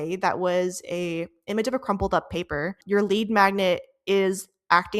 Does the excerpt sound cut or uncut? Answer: cut